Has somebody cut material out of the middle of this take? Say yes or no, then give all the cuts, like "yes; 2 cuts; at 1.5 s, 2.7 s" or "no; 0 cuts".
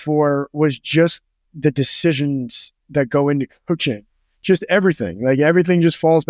no; 0 cuts